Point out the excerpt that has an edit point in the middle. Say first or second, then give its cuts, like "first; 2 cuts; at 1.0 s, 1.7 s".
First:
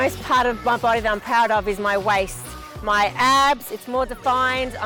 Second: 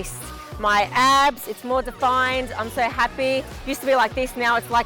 second; 1 cut; at 3.6 s